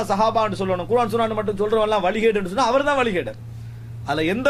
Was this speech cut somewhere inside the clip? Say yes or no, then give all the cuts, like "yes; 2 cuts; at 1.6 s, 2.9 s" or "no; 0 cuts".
no; 0 cuts